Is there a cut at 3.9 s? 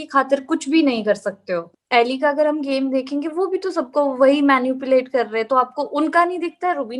no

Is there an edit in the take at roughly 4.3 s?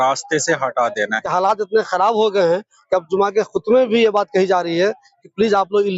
no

